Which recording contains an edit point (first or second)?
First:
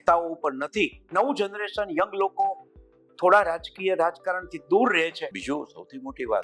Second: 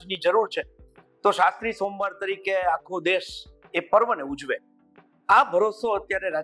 first